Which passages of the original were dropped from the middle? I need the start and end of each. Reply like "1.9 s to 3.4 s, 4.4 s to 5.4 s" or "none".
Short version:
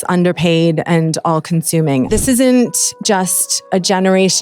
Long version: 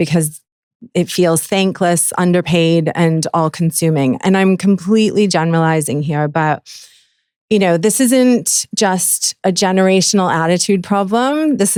4.2 s to 7.8 s